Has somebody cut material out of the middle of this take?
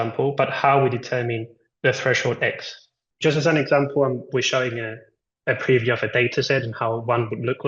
no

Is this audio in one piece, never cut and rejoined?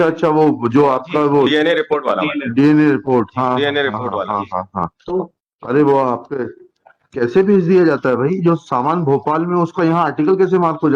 yes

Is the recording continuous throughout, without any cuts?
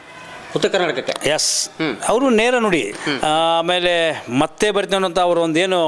no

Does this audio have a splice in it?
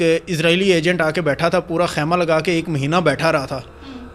no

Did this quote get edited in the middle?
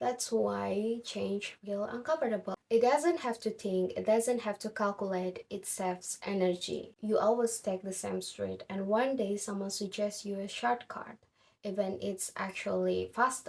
yes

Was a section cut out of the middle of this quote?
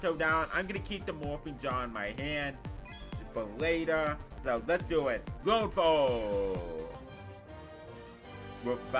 yes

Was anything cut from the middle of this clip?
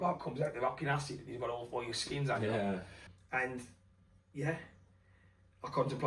yes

